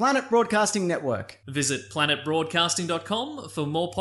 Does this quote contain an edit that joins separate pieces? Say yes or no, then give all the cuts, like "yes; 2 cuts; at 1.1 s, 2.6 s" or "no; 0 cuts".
no; 0 cuts